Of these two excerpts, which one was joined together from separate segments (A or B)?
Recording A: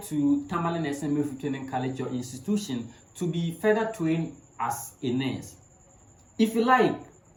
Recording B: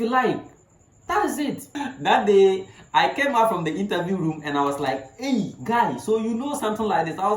B